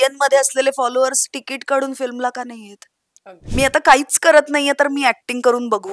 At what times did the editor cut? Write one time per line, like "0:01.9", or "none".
0:03.4